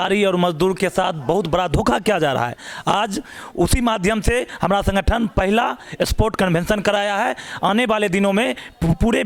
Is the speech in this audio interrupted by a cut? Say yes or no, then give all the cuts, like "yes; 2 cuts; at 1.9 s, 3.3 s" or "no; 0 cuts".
no; 0 cuts